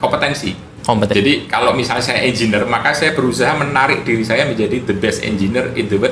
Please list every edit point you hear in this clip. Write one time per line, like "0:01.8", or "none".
0:01.1